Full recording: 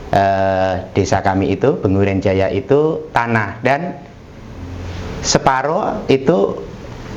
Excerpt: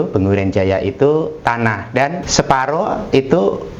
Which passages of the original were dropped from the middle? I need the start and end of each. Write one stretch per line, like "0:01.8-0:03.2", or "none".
0:03.9-0:05.2

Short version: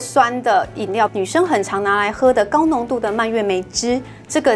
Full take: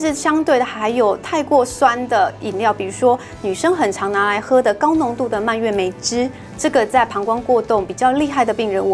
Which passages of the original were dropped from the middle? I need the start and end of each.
0:02.8-0:03.4

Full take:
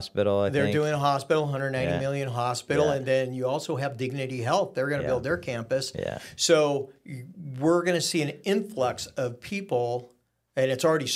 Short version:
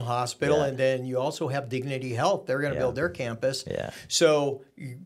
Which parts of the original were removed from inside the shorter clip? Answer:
none

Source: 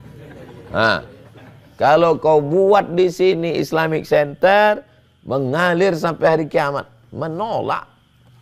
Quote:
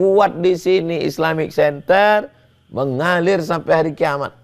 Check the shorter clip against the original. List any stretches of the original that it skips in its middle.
none

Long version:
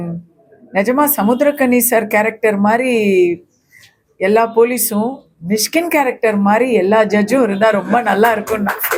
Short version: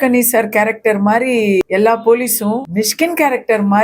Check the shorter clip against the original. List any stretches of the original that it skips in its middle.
0:03.2-0:04.1
0:05.2-0:05.4

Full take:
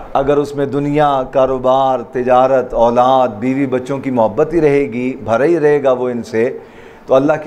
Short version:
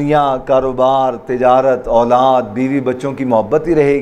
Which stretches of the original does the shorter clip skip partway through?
none

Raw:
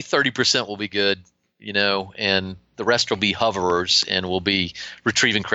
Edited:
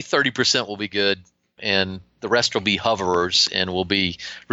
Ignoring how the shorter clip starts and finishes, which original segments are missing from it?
0:01.6-0:02.1

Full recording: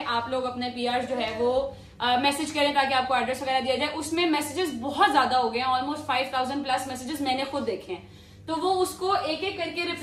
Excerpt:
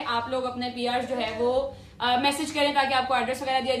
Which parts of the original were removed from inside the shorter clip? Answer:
none

